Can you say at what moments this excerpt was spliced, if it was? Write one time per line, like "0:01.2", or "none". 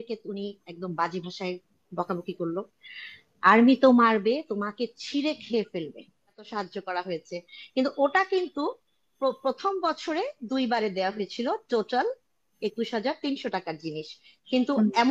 0:06.4